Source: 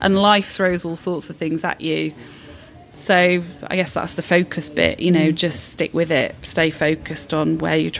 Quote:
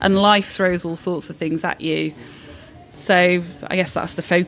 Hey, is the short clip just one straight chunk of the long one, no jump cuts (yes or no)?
yes